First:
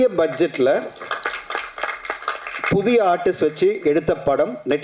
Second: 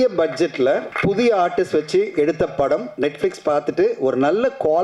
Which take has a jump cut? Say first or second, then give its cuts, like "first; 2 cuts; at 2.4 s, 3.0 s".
second; 1 cut; at 0.9 s